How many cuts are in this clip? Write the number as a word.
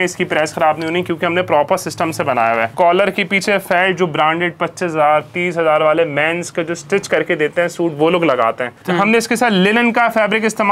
two